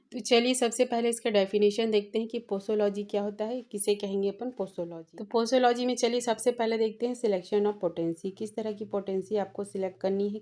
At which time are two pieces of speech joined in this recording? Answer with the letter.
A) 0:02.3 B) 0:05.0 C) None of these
B